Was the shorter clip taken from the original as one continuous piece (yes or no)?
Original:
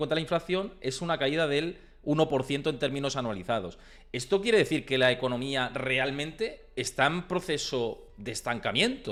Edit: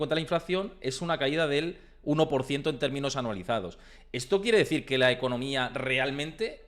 yes